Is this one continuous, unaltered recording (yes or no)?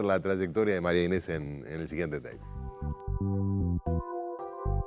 no